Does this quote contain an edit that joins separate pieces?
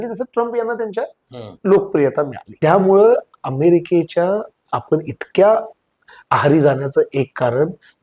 yes; 1 cut; at 2.4 s

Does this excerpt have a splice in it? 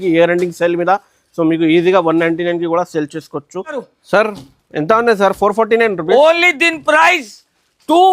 yes; 1 cut; at 3.8 s

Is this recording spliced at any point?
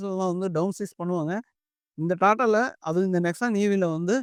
no; 0 cuts

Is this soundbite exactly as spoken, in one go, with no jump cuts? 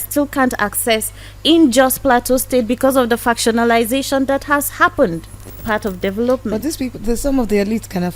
no; 1 cut; at 5.7 s

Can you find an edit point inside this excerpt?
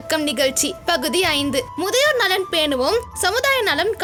no; 0 cuts

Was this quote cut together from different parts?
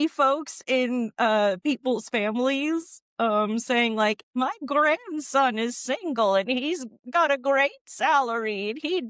no; 0 cuts

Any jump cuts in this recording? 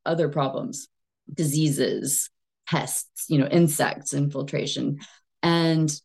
no; 0 cuts

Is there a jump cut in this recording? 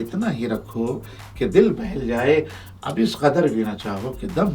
no; 0 cuts

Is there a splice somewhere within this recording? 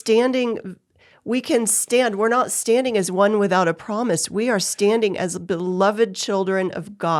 no; 0 cuts

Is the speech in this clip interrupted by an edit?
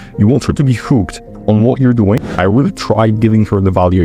yes; 1 cut; at 2.4 s

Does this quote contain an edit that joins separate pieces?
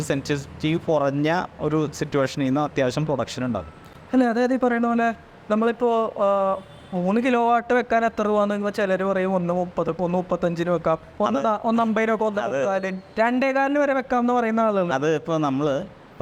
no; 0 cuts

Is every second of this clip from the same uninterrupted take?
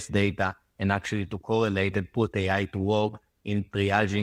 yes; 0 cuts

